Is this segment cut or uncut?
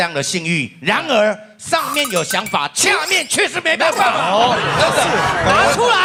uncut